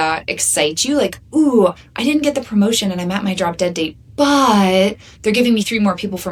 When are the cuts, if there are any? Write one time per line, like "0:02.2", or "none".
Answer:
none